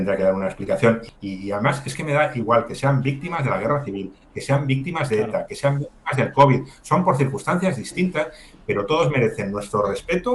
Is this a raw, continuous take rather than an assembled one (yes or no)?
no